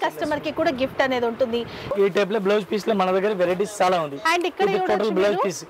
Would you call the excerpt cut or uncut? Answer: cut